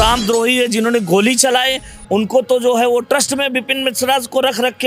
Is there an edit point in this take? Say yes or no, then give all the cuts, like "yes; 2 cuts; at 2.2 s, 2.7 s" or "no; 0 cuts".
no; 0 cuts